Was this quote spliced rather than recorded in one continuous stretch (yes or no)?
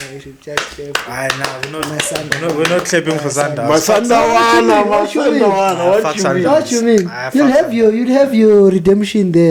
no